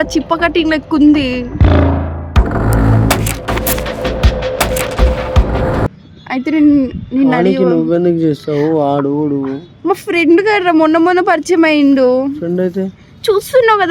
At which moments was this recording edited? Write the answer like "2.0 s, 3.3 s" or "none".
5.9 s